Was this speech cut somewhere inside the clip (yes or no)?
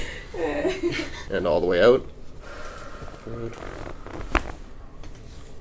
yes